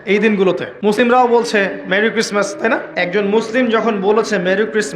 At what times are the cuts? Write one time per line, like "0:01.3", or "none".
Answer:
0:00.9
0:03.0